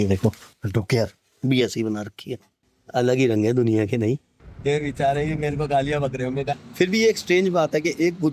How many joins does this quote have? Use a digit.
2